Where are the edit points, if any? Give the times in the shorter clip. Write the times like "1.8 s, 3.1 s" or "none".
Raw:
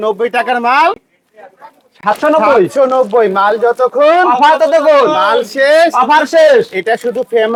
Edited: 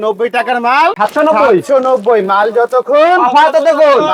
0.9 s